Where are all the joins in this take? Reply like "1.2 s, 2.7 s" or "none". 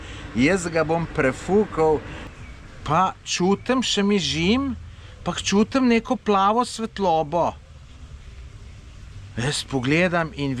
2.2 s